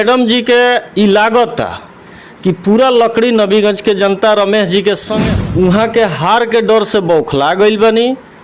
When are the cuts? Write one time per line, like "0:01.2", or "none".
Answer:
0:05.1

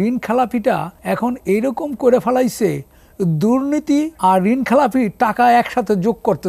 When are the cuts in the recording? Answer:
0:00.9
0:04.1

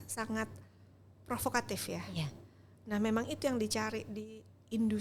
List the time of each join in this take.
none

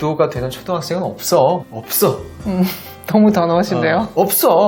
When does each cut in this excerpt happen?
0:01.6

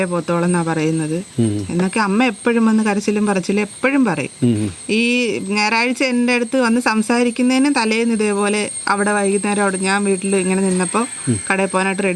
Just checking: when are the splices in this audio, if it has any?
none

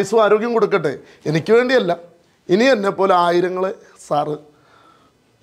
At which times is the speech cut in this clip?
none

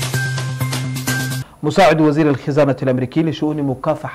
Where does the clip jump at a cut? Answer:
0:01.4

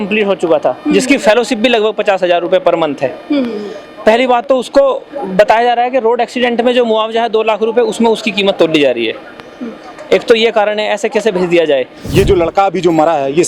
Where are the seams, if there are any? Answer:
0:12.1

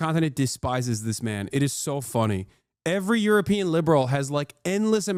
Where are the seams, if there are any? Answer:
none

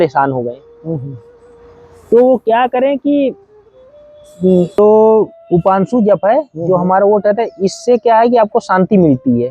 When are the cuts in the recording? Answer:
0:04.8

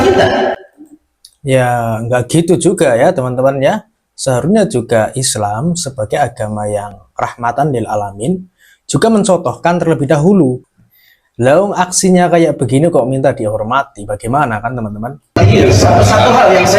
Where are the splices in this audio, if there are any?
0:10.7
0:15.4

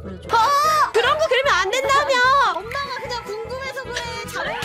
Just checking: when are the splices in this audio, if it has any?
0:00.9

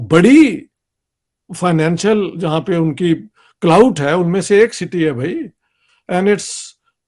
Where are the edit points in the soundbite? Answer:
none

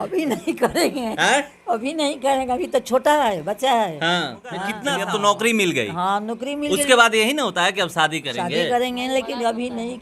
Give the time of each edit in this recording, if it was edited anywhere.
0:04.7

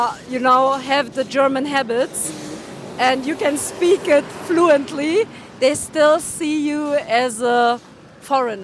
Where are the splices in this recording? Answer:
none

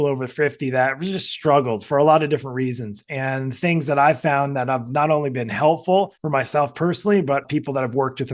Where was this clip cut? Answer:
0:06.2

